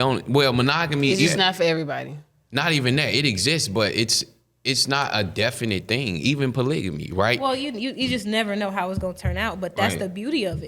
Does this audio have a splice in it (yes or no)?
yes